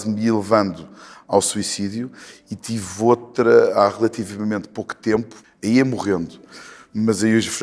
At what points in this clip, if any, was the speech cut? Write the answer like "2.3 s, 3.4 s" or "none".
5.4 s